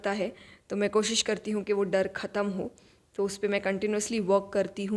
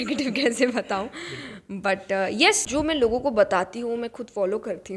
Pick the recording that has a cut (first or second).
second